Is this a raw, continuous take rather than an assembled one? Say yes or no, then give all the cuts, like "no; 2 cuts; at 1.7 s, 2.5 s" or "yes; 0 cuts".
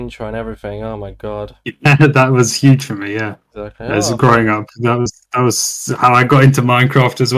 yes; 0 cuts